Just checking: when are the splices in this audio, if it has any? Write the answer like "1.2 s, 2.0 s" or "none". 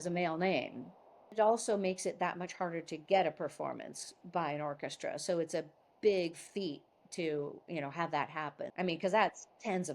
1.4 s, 8.6 s